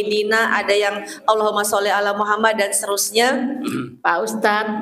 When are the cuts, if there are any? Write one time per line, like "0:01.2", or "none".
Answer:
0:03.9